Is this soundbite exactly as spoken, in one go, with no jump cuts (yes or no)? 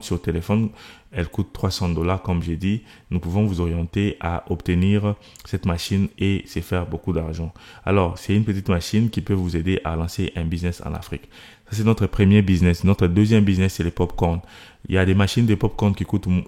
yes